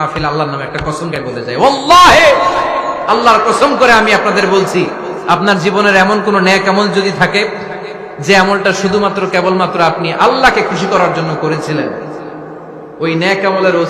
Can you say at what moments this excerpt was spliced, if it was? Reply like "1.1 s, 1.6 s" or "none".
1.1 s